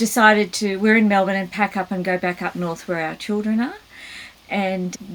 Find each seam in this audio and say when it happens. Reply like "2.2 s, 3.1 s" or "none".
none